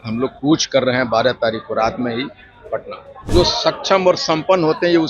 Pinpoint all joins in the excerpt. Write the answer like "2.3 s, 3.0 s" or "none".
3.3 s